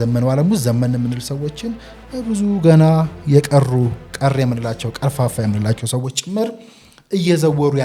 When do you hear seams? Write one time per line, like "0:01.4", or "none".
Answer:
none